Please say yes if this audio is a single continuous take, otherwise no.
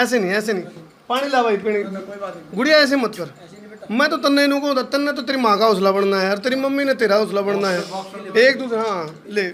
yes